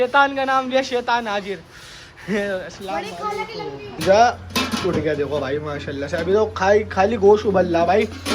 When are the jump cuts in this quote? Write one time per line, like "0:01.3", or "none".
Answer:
0:04.0